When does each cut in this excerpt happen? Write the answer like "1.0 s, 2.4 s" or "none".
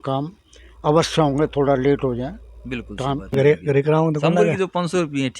3.3 s